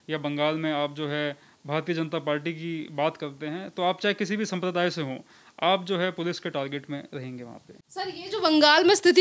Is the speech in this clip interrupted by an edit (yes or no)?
no